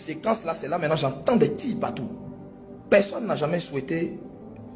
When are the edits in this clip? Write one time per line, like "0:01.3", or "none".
0:01.5